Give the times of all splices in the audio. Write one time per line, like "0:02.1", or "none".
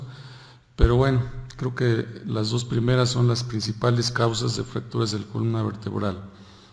none